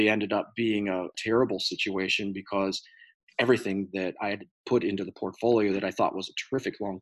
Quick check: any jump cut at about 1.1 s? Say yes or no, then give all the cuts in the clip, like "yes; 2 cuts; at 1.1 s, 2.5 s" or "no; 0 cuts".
yes; 1 cut; at 1.1 s